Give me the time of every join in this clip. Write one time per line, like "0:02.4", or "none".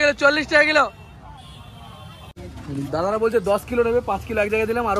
0:02.3

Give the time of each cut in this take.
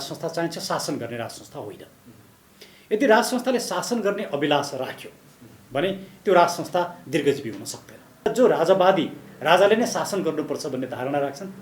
0:08.3

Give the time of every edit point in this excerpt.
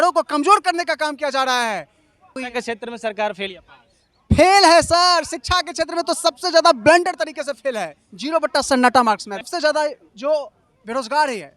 0:02.4
0:09.5

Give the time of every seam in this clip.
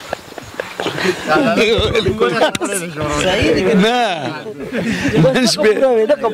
none

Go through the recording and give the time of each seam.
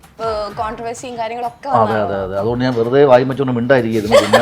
none

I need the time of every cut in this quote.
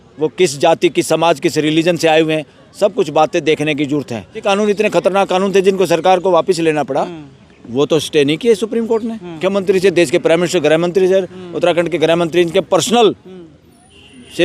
0:04.4
0:09.4

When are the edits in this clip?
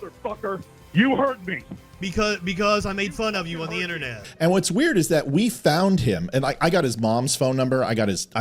0:04.3

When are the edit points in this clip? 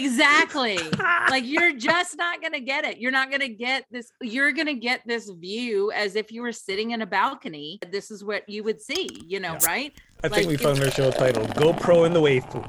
0:07.9

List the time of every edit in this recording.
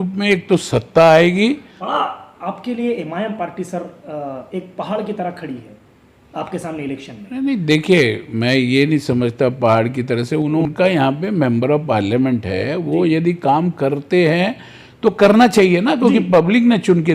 0:01.8
0:10.6

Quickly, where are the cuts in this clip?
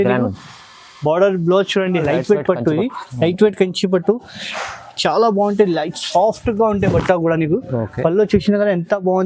0:02.0

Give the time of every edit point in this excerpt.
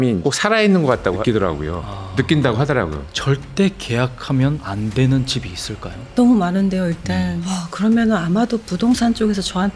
0:01.2
0:03.1
0:07.4

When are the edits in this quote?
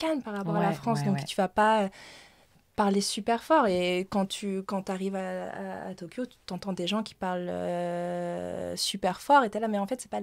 none

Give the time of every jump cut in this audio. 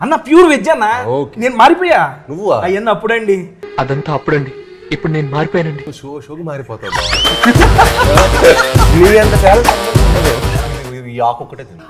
0:10.6

